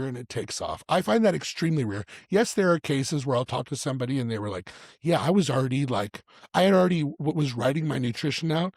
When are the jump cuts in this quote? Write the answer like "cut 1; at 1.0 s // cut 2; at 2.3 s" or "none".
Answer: none